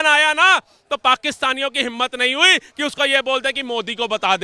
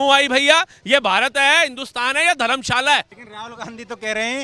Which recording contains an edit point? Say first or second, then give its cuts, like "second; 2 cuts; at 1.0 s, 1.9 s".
second; 1 cut; at 3.2 s